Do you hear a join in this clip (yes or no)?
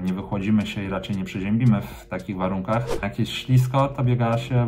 yes